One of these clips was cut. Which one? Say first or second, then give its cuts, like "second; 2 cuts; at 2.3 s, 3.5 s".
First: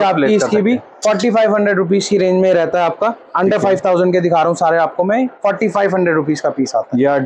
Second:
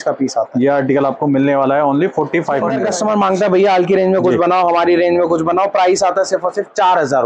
second; 1 cut; at 2.8 s